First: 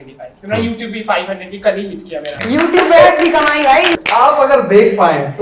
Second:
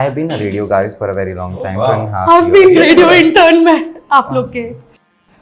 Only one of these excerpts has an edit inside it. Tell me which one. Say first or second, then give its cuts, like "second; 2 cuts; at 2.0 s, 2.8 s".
first; 2 cuts; at 2.4 s, 4.0 s